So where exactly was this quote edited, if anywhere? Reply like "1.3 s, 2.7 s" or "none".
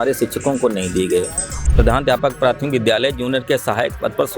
1.5 s